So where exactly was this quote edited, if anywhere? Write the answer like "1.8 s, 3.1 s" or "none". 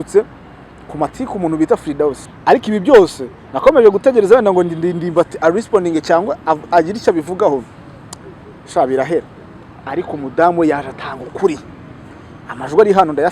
2.3 s